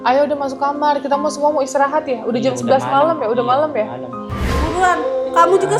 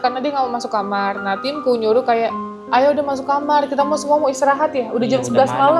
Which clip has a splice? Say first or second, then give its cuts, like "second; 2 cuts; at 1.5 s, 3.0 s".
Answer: first; 1 cut; at 4.5 s